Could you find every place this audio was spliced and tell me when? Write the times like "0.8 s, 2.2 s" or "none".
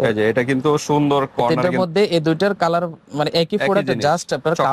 1.6 s